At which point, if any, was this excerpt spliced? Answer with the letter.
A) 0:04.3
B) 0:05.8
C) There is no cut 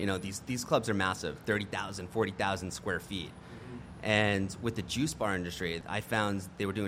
B